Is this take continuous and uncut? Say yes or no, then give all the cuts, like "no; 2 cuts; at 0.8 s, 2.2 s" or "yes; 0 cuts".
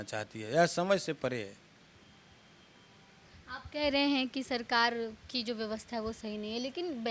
yes; 0 cuts